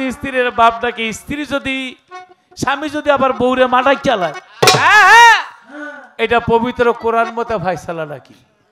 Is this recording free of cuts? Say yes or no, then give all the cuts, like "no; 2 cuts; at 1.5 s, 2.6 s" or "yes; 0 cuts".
yes; 0 cuts